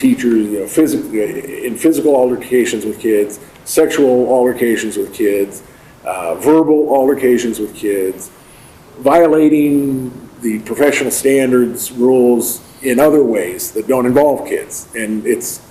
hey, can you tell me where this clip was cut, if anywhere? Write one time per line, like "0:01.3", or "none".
none

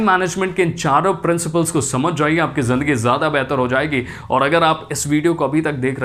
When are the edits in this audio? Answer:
none

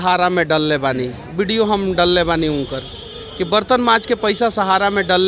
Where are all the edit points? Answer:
none

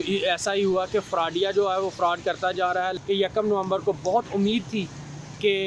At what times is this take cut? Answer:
0:03.0

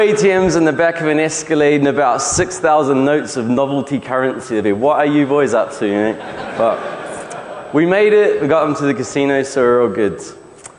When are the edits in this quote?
none

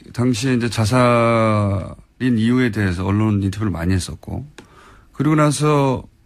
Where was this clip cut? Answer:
0:04.5

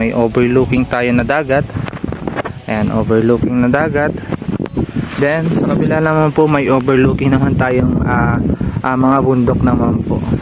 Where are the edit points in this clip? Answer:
none

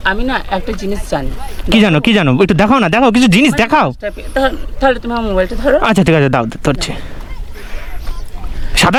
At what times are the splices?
none

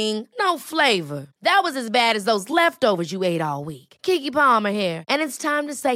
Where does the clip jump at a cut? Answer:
none

